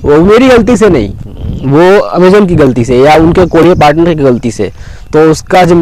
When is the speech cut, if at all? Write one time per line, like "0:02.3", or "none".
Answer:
none